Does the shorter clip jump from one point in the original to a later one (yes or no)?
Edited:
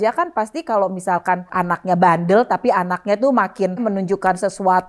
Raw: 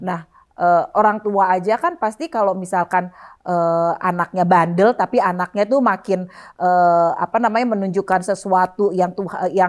yes